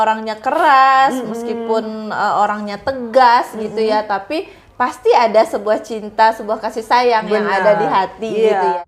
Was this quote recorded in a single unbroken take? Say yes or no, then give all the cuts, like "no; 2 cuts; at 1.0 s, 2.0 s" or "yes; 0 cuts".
yes; 0 cuts